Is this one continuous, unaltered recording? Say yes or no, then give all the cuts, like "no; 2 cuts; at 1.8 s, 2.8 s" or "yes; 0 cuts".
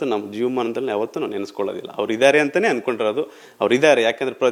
yes; 0 cuts